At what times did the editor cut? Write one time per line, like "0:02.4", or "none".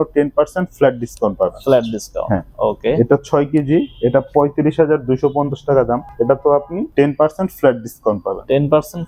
none